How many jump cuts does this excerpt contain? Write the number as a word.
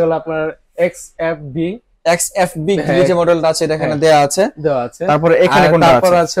one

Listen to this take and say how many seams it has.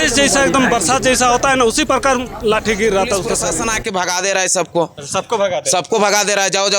one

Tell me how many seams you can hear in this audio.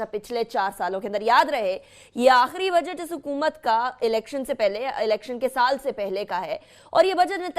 one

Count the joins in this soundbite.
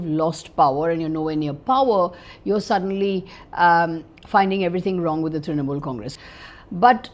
one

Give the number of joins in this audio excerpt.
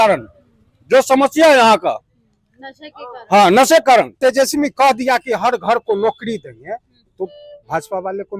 one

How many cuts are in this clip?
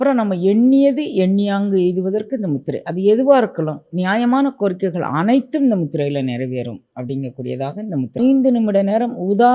one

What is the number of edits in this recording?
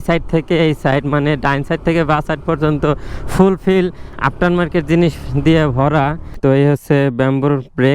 one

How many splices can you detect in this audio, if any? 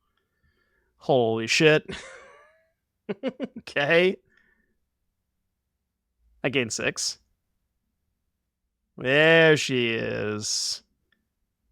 zero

